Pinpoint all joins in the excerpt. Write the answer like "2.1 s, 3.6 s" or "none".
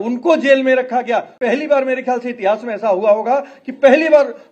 1.3 s